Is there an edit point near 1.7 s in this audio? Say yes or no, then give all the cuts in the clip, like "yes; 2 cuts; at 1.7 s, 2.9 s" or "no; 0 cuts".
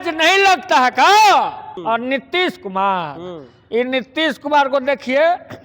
yes; 1 cut; at 1.7 s